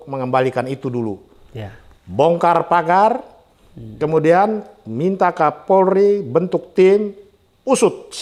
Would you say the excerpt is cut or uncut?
uncut